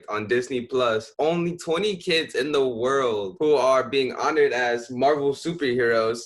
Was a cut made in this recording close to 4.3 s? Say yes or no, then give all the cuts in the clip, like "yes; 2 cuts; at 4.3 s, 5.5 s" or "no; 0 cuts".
no; 1 cut; at 1.1 s